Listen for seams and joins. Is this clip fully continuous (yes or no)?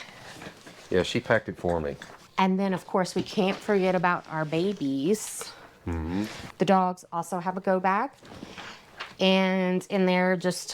no